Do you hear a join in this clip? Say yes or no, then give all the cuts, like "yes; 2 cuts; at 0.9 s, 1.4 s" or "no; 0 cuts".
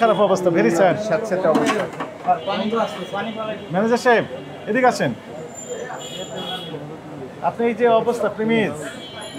no; 0 cuts